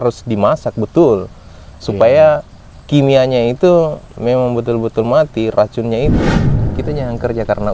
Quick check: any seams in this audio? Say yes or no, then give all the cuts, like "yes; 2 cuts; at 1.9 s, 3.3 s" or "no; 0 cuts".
yes; 1 cut; at 6.5 s